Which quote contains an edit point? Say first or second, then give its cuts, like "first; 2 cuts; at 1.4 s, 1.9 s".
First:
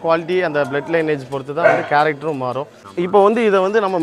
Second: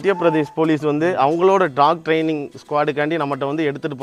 first; 1 cut; at 2.7 s